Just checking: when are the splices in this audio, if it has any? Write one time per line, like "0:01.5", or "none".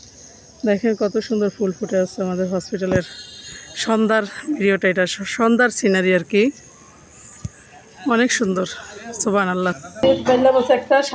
0:10.0